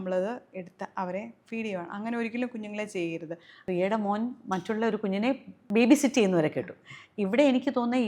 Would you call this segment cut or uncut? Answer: cut